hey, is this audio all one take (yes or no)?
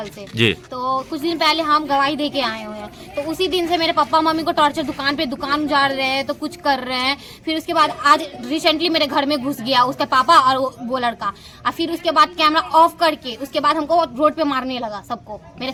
yes